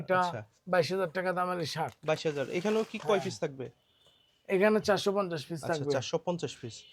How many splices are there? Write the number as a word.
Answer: zero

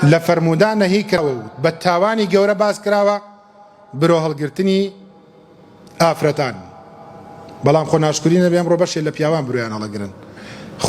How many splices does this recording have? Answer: one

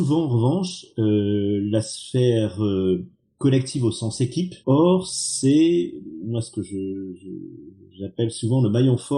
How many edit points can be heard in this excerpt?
one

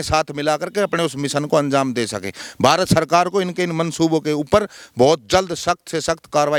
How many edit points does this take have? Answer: zero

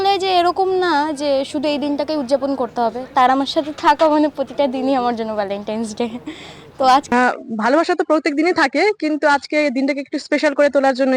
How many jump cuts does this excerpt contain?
one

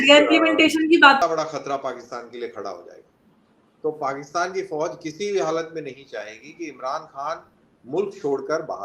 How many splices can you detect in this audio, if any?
one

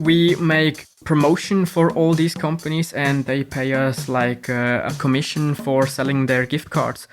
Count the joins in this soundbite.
two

